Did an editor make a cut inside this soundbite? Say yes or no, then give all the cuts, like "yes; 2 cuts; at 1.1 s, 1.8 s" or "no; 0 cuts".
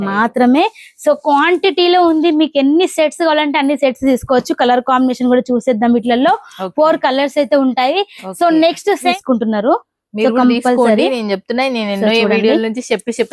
yes; 1 cut; at 9.1 s